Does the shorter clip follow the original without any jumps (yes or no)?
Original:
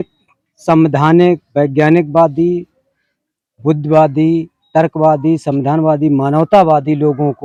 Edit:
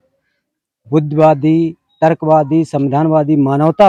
yes